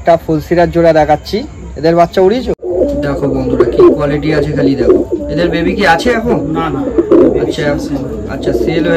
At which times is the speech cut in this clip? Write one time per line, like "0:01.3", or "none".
0:02.7